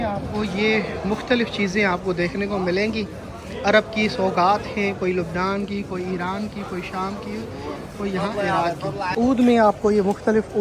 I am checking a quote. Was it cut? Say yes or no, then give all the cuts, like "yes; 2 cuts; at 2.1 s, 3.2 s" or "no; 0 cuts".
yes; 1 cut; at 9.1 s